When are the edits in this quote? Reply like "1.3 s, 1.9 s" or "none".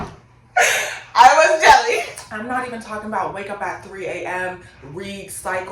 2.1 s